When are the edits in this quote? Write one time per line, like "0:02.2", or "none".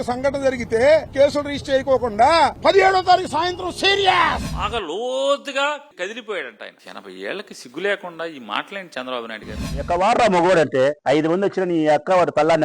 0:04.5
0:06.8
0:09.7